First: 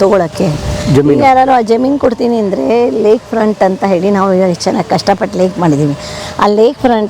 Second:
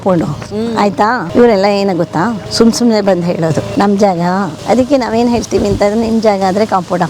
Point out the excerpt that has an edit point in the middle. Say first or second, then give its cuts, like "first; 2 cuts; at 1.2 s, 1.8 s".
second; 4 cuts; at 1.3 s, 2.4 s, 3.7 s, 4.6 s